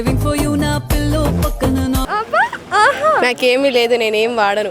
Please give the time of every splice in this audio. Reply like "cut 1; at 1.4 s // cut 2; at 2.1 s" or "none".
cut 1; at 2.0 s